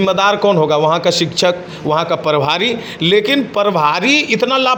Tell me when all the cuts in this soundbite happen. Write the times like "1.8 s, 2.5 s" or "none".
none